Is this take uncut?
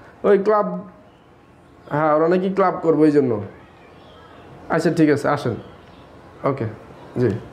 yes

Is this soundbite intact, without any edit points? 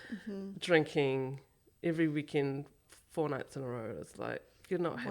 yes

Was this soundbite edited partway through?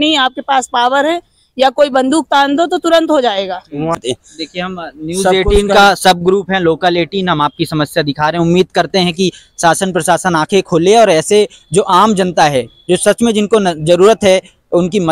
no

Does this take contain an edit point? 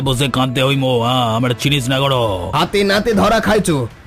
yes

